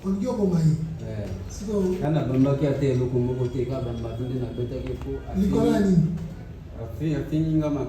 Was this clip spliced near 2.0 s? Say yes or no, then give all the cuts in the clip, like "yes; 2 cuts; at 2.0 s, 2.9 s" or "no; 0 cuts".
yes; 1 cut; at 2.0 s